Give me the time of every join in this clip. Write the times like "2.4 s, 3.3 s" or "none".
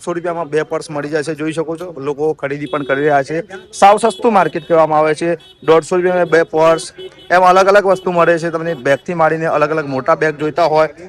none

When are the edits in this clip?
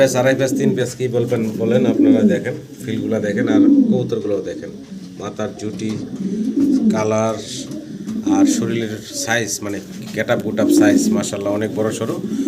none

